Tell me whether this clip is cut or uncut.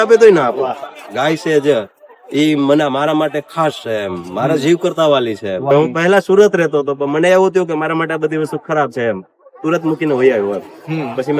cut